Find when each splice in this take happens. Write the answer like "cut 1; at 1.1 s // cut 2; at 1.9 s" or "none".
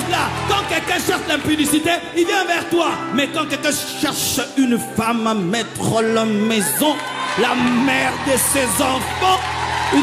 none